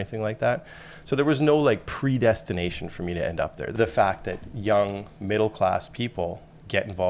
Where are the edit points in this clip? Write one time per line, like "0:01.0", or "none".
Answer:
0:03.7